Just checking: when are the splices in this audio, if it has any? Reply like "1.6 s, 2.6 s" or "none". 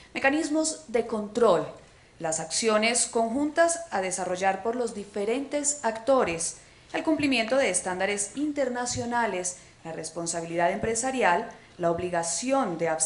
11.6 s